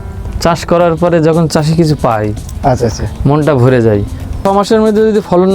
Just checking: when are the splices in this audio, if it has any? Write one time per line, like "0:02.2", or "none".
0:04.4